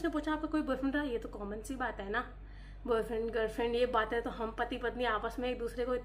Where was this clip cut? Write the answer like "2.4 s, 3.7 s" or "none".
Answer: none